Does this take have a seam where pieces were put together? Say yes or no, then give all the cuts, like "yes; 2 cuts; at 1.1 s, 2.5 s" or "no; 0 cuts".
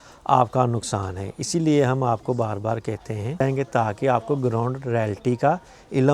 yes; 1 cut; at 3.4 s